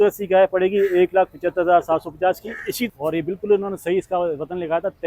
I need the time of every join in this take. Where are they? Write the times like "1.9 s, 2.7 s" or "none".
2.9 s

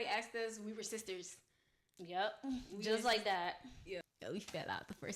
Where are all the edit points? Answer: 4.0 s

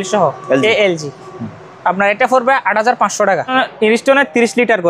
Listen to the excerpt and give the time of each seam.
3.5 s

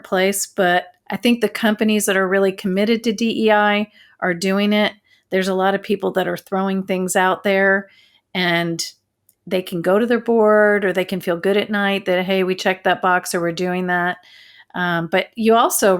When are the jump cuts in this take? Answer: 1.0 s

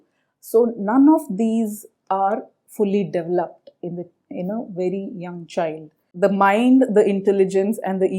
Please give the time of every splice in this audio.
6.0 s

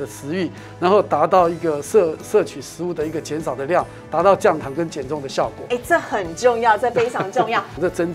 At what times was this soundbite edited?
none

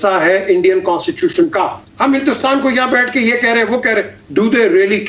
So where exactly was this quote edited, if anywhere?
1.8 s

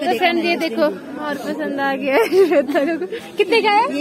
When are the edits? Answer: none

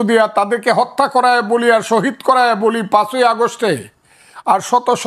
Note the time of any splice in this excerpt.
none

